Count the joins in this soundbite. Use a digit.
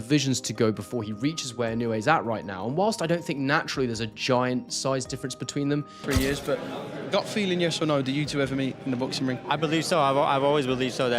1